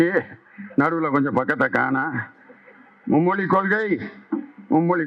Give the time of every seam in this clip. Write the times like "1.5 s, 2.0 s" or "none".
none

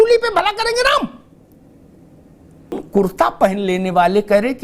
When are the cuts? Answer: 2.8 s

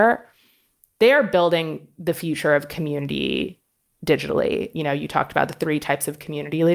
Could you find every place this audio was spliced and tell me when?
4.7 s

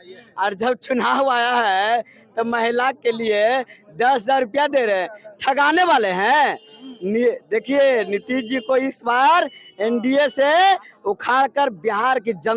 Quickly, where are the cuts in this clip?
none

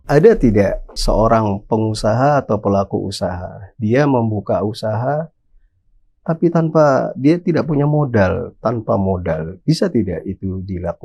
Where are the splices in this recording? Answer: 1.0 s

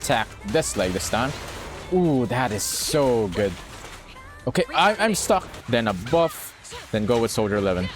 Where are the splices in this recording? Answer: 5.6 s

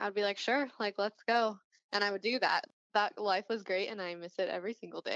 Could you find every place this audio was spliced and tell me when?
2.7 s

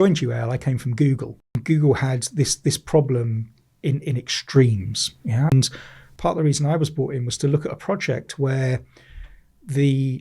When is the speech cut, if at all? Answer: 1.6 s, 5.5 s

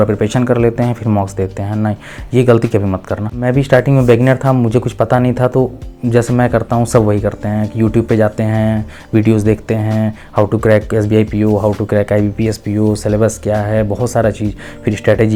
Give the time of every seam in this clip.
3.3 s

